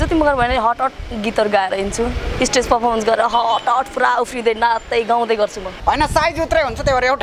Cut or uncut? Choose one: cut